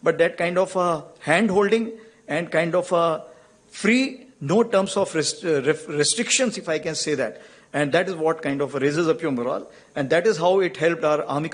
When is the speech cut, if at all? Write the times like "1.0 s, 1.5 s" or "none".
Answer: none